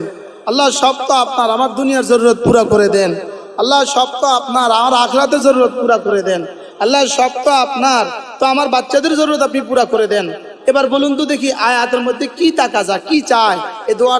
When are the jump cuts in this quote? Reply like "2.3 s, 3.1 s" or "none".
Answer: none